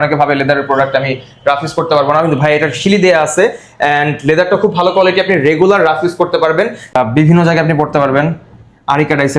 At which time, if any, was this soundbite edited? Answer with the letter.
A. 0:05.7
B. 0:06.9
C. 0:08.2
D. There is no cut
B